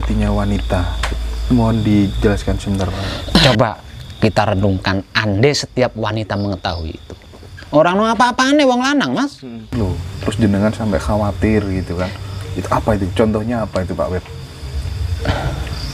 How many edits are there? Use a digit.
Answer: 2